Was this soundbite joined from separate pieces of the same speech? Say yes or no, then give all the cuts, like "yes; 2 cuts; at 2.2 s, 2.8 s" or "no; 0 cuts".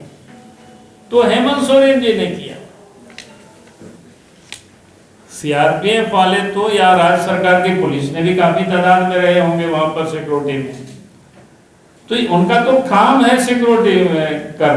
no; 0 cuts